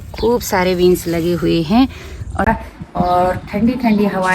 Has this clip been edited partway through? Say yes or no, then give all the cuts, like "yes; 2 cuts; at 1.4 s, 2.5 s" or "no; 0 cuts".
yes; 1 cut; at 2.4 s